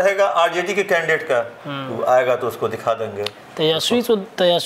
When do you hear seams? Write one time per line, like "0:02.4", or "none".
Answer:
none